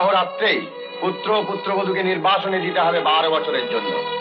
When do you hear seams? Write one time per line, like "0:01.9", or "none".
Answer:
none